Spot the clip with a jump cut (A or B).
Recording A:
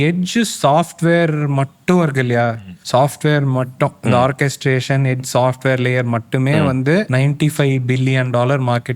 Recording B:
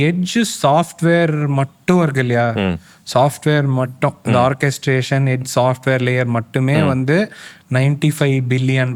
A